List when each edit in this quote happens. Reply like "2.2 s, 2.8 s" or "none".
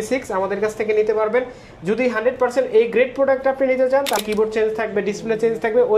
4.2 s